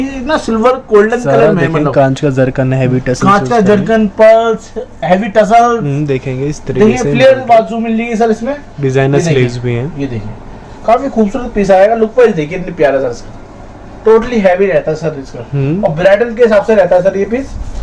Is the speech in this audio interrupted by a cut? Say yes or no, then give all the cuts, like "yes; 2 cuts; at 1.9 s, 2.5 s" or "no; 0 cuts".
no; 0 cuts